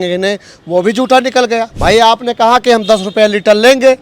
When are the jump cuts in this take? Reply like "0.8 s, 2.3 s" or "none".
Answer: 1.7 s

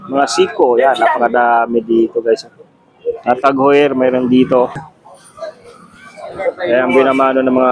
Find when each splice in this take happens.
4.8 s

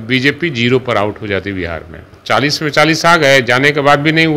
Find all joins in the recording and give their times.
2.1 s

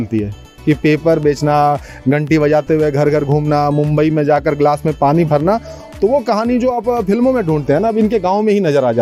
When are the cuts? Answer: none

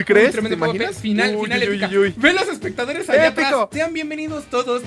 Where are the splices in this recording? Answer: 3.7 s

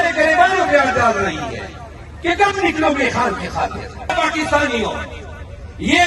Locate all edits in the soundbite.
4.1 s

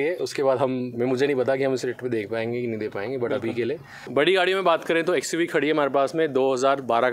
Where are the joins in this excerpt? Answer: 3.9 s

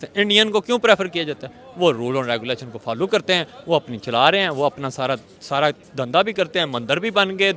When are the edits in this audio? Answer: none

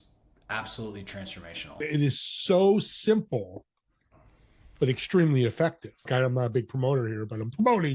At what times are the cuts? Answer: 1.8 s, 6.1 s

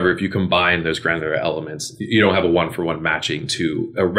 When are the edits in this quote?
none

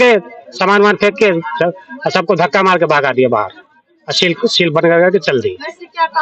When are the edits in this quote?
none

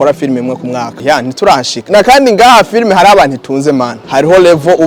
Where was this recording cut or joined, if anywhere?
0.9 s, 1.8 s, 4.0 s

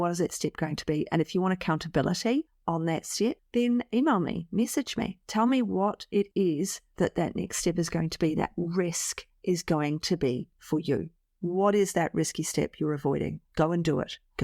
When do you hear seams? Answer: 11.2 s

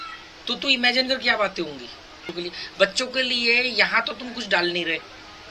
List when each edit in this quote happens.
2.3 s

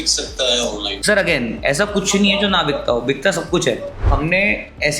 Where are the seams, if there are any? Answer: 0.9 s, 4.0 s

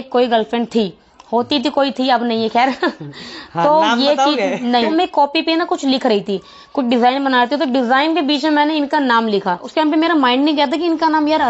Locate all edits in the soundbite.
5.1 s, 9.7 s

